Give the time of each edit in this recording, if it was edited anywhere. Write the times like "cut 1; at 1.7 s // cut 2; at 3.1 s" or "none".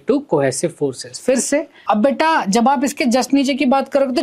cut 1; at 1.7 s